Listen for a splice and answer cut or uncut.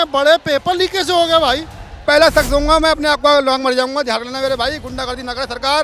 cut